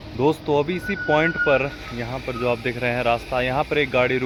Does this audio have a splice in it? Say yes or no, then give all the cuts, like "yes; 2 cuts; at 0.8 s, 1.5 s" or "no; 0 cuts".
no; 0 cuts